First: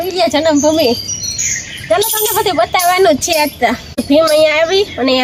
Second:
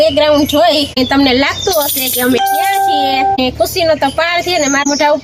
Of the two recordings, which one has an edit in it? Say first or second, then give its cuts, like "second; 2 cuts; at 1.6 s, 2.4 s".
first; 1 cut; at 4.0 s